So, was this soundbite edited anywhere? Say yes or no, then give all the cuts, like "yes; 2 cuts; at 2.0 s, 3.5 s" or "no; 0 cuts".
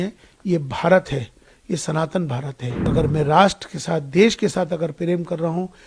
yes; 1 cut; at 2.9 s